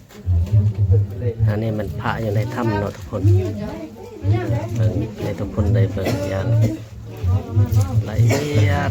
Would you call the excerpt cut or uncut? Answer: uncut